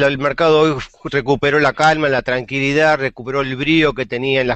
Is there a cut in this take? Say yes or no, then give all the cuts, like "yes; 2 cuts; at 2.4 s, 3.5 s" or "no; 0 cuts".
yes; 1 cut; at 2.1 s